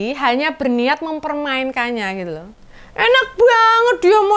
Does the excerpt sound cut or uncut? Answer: cut